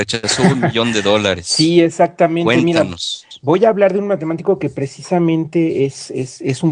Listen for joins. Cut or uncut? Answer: cut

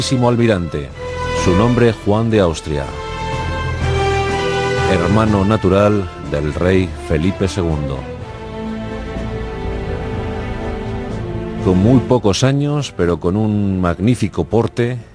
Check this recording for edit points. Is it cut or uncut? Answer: uncut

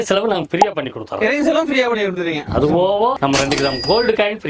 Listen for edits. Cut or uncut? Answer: uncut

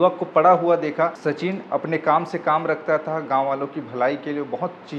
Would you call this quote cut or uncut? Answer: cut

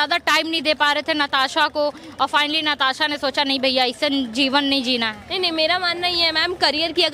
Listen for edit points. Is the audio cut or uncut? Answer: uncut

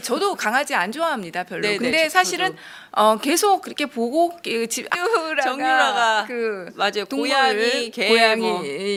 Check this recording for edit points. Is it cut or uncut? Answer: uncut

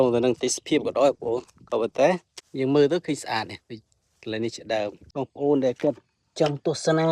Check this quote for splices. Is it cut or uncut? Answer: cut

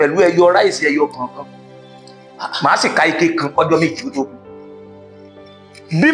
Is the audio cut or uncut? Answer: uncut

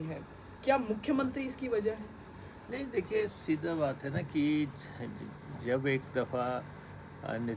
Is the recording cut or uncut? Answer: uncut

